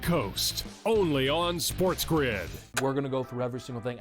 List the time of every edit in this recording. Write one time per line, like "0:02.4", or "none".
0:02.6

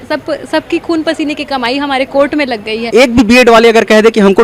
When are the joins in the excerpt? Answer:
0:02.9

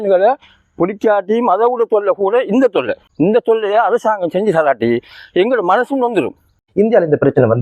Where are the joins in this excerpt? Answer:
0:03.0
0:06.6

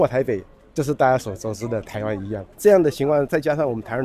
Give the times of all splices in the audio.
0:02.5

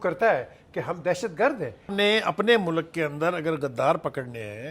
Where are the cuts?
0:01.9

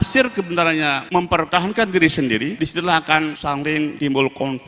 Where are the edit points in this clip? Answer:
0:01.3
0:02.5
0:03.7

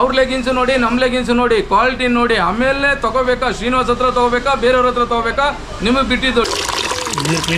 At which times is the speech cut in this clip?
0:06.5

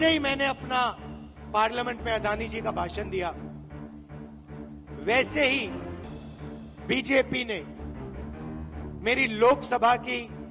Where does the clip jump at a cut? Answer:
0:07.6
0:09.0

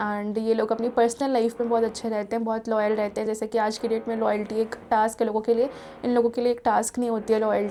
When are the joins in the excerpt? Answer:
none

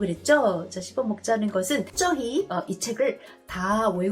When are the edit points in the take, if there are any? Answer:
0:01.9

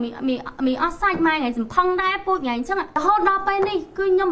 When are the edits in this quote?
0:03.0

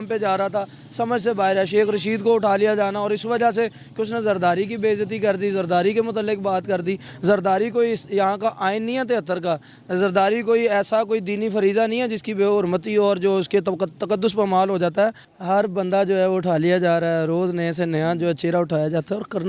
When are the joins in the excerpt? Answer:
0:15.3

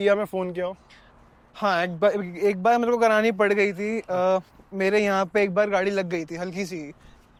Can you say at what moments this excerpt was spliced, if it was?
none

